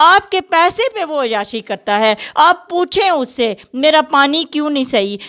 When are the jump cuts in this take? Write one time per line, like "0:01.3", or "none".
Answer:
none